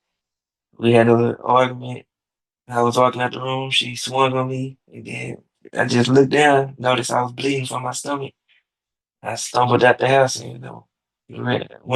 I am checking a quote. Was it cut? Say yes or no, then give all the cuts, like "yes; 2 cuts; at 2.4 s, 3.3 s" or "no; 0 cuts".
no; 0 cuts